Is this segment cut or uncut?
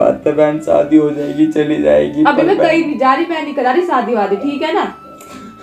uncut